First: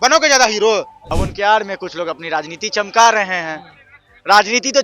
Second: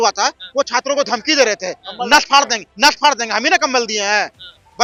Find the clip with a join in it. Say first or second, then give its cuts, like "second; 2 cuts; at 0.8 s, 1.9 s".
first; 1 cut; at 1.0 s